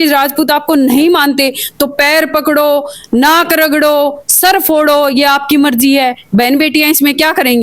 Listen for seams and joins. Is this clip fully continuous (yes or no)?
yes